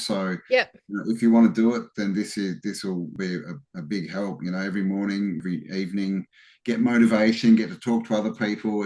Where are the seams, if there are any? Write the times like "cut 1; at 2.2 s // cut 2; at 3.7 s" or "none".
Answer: cut 1; at 3.1 s // cut 2; at 5.4 s